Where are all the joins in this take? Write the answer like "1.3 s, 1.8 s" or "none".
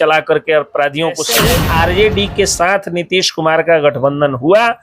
1.3 s